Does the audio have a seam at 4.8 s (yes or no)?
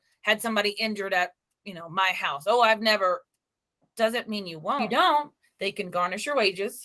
yes